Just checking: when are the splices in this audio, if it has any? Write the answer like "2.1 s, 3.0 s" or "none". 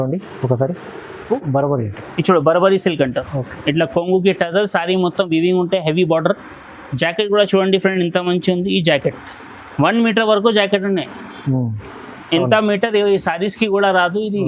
1.3 s